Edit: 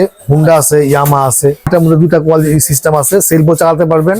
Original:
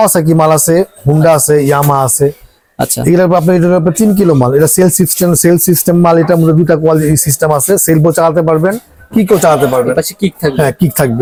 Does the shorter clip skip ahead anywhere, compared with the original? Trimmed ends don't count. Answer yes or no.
yes